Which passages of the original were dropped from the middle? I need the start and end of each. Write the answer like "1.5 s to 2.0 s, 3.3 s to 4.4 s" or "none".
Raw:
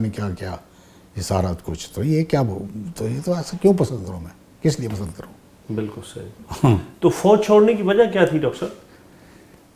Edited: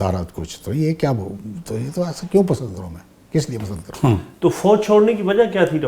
5.2 s to 6.5 s